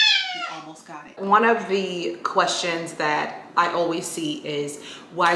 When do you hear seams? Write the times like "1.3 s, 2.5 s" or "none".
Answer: 1.1 s

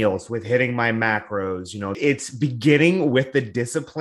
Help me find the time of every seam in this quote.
2.0 s

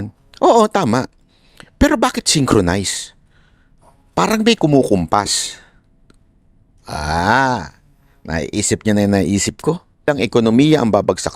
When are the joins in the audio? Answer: 10.1 s

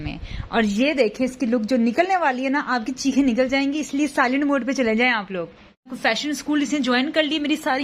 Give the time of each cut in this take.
5.9 s

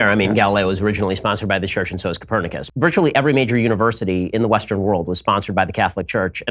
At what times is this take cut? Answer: 2.6 s

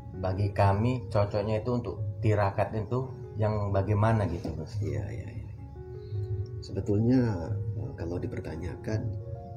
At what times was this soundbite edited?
none

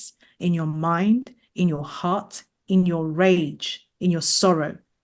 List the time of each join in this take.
none

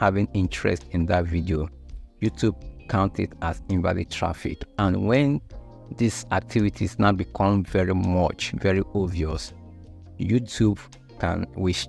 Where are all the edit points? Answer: none

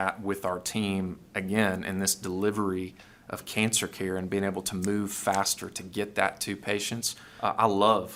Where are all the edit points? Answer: none

